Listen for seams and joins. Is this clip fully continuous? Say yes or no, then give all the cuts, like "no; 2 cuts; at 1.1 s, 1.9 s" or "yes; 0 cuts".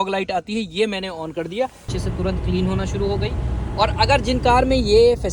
no; 1 cut; at 1.9 s